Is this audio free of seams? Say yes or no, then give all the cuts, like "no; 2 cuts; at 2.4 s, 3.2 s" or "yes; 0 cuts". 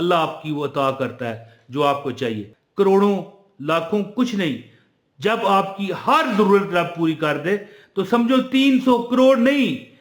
no; 1 cut; at 2.5 s